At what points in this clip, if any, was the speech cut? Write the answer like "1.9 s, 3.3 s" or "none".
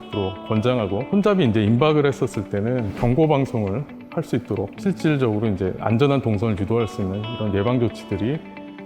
1.0 s, 2.9 s, 4.7 s